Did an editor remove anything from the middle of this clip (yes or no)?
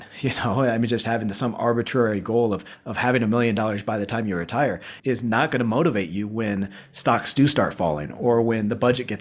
no